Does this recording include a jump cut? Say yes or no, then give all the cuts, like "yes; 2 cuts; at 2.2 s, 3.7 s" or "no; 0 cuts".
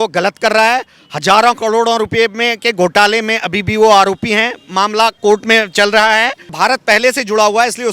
yes; 2 cuts; at 5.2 s, 6.5 s